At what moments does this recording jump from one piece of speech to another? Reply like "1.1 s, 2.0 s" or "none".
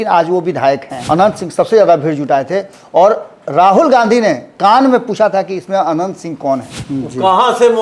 0.9 s, 6.8 s